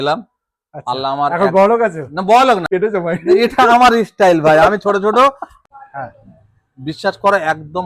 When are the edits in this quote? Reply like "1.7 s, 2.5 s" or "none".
2.6 s, 5.6 s